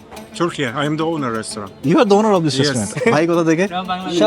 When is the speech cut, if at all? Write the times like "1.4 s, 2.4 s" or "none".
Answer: 2.9 s